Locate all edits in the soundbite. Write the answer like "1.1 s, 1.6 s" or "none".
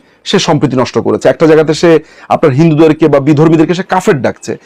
none